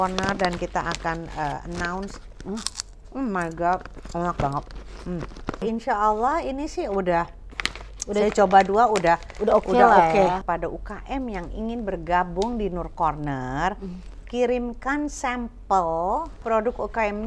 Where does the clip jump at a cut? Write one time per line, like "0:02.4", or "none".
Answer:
0:05.6
0:10.4
0:16.4